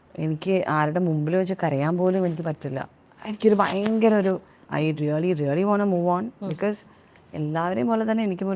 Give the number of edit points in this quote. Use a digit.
1